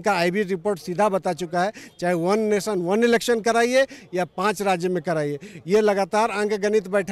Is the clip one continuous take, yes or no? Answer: yes